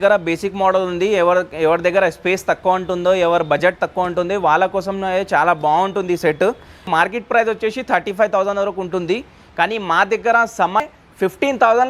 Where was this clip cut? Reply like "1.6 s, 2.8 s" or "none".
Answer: 6.9 s, 10.8 s

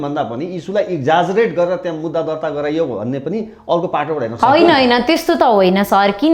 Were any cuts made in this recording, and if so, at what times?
none

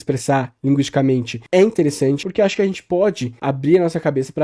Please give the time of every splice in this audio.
1.3 s, 2.2 s, 3.3 s

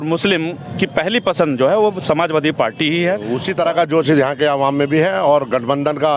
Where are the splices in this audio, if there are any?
3.4 s

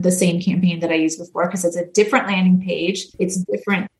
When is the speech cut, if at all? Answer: 3.1 s

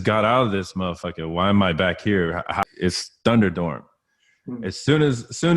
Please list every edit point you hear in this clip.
2.6 s

